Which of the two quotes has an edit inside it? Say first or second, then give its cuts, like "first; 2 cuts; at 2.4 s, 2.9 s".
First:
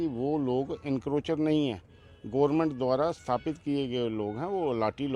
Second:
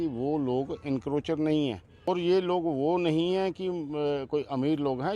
second; 1 cut; at 1.9 s